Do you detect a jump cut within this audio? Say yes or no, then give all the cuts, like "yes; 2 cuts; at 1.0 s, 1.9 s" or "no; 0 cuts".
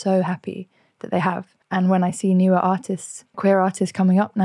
yes; 2 cuts; at 1.5 s, 3.4 s